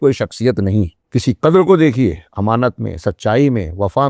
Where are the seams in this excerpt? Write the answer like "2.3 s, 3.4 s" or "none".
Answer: 1.0 s